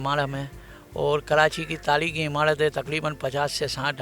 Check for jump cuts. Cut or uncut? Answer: uncut